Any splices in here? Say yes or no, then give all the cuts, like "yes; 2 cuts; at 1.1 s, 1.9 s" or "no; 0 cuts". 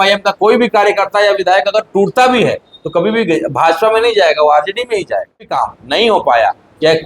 yes; 1 cut; at 5.5 s